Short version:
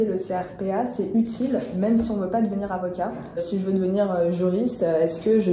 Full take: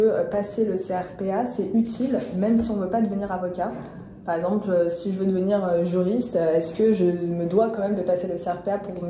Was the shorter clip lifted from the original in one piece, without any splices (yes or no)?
no